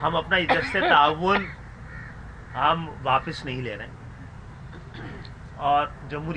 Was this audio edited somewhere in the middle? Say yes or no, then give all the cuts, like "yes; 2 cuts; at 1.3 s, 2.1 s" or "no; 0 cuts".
no; 0 cuts